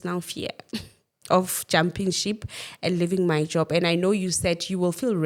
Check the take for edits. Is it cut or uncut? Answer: uncut